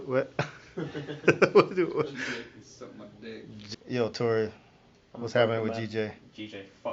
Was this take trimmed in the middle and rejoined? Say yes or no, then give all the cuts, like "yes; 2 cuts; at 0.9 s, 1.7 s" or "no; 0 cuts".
yes; 1 cut; at 3.5 s